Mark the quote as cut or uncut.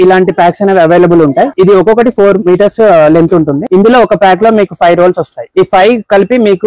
cut